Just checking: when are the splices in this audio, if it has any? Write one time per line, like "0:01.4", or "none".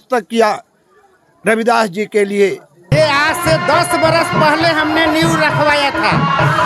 0:02.9